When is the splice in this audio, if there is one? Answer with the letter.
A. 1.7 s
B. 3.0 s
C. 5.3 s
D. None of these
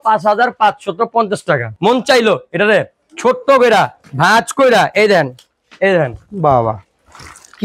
A